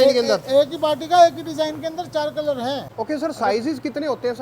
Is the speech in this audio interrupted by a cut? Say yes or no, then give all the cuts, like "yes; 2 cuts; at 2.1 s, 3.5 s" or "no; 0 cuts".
yes; 1 cut; at 2.9 s